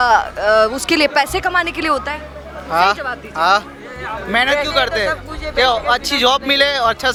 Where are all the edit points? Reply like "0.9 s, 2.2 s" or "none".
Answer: none